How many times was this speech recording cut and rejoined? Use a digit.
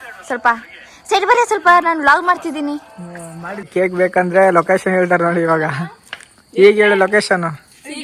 1